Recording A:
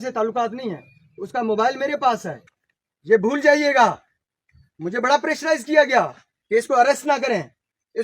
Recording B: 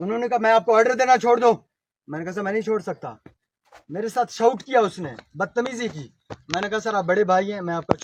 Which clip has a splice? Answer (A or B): A